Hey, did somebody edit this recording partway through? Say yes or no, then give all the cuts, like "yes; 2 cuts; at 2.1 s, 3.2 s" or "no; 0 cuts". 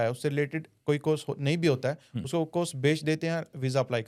no; 0 cuts